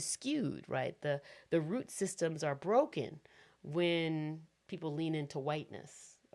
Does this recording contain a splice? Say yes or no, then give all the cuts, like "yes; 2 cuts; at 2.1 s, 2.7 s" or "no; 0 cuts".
no; 0 cuts